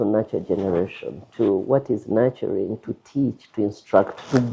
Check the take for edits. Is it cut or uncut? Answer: uncut